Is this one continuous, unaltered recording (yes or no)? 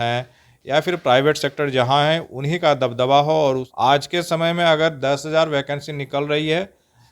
no